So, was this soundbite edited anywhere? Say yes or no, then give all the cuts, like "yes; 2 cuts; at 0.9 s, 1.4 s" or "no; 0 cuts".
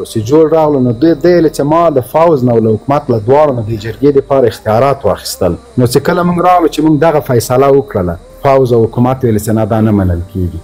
yes; 2 cuts; at 5.6 s, 8.2 s